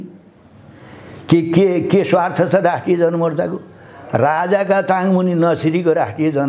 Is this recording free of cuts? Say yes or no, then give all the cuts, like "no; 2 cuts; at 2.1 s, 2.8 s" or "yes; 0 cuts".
yes; 0 cuts